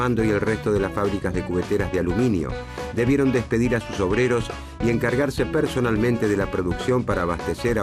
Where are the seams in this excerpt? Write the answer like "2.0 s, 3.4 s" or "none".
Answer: 1.7 s